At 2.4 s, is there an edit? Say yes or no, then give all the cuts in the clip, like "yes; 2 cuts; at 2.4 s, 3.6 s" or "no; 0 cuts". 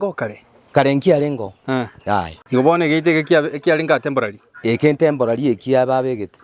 yes; 1 cut; at 2.4 s